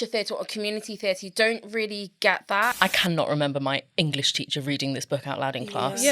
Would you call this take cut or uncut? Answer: cut